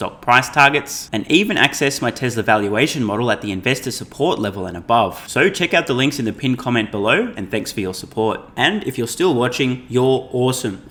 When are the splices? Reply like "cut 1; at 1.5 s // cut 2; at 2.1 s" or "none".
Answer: none

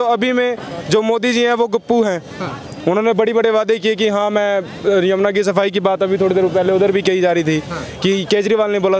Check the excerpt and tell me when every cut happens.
none

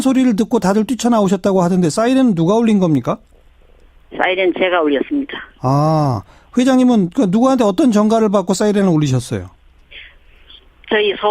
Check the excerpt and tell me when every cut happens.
cut 1; at 5.9 s

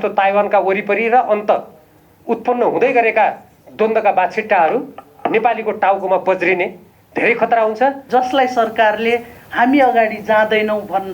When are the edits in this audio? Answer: cut 1; at 8.0 s

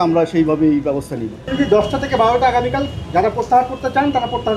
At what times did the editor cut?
cut 1; at 1.4 s

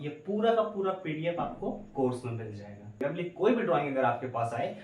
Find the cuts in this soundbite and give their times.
cut 1; at 3.0 s

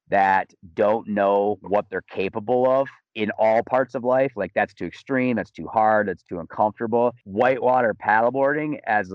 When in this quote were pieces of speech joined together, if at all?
cut 1; at 7.2 s

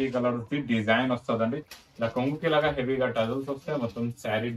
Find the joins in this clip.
cut 1; at 1.6 s

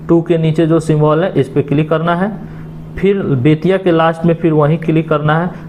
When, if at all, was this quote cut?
none

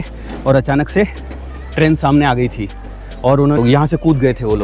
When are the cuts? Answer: cut 1; at 3.6 s

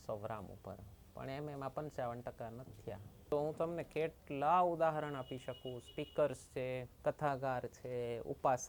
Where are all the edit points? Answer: cut 1; at 3.3 s // cut 2; at 6.9 s

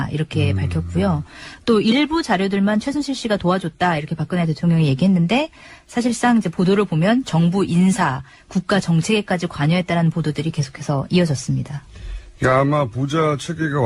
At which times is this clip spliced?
cut 1; at 12.7 s

